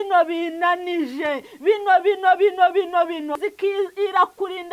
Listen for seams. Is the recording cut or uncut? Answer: cut